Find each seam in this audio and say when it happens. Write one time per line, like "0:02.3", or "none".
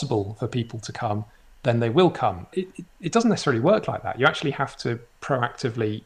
none